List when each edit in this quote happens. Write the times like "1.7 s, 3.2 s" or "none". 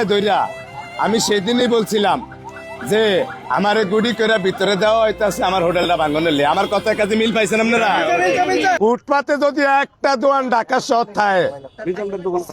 8.8 s